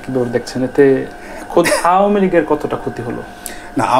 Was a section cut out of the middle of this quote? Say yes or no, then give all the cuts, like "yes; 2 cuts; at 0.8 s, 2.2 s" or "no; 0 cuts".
no; 0 cuts